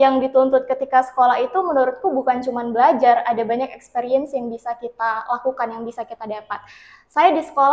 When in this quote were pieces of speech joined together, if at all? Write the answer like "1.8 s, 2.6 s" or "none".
none